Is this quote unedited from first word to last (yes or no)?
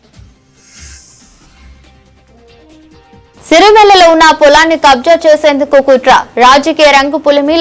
no